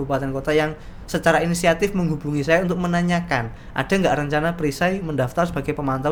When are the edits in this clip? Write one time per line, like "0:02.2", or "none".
none